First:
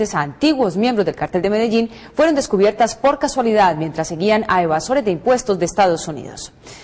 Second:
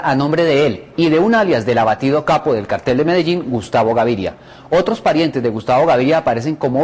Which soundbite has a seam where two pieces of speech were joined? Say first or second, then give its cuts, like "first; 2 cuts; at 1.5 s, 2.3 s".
second; 1 cut; at 5.7 s